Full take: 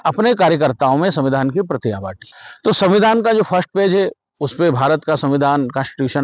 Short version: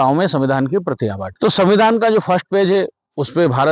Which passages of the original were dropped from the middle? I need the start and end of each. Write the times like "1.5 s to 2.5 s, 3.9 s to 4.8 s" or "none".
2.1 s to 2.5 s